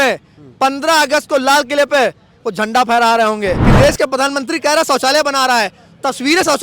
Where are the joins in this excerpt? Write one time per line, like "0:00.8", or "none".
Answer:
0:03.7